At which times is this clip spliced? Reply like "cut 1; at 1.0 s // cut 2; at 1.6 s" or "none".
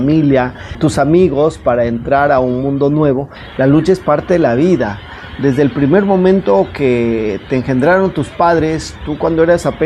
cut 1; at 3.4 s